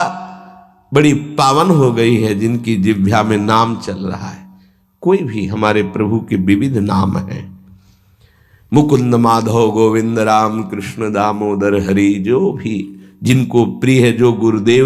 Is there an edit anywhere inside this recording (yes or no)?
no